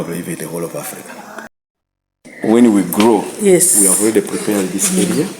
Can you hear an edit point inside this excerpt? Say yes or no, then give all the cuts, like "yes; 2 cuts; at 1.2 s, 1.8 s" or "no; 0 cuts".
yes; 1 cut; at 1.4 s